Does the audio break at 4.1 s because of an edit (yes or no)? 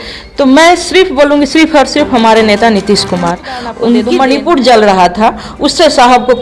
yes